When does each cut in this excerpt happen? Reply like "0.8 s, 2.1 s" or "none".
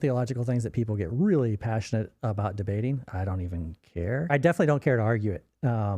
3.1 s, 4.3 s